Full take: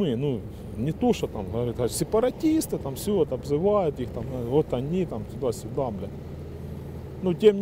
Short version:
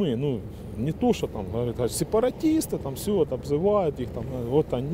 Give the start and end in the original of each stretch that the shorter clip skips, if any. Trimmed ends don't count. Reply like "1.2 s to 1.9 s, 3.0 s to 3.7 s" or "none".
none